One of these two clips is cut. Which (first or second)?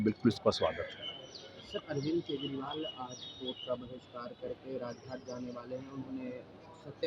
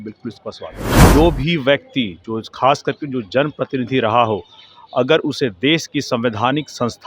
second